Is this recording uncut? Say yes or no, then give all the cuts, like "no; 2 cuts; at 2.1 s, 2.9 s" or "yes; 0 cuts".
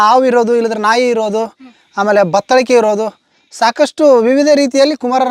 yes; 0 cuts